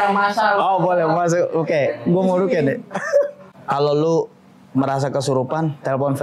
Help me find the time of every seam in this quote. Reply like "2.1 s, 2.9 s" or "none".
3.4 s